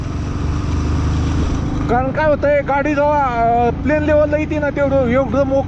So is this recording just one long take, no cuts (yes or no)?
yes